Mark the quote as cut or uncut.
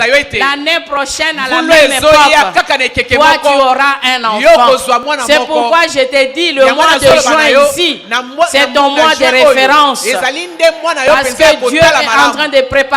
uncut